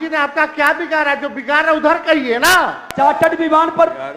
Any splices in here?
yes; 1 cut; at 2.8 s

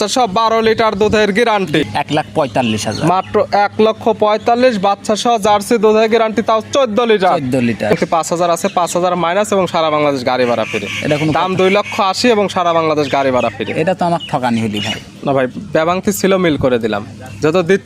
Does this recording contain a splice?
yes; 2 cuts; at 1.8 s, 7.9 s

